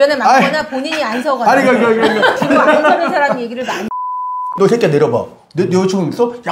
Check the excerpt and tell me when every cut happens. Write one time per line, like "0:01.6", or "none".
0:04.5